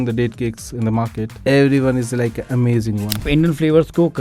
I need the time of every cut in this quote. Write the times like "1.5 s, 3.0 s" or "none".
1.3 s, 3.2 s